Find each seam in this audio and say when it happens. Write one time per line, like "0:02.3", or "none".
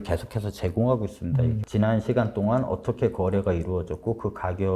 0:01.6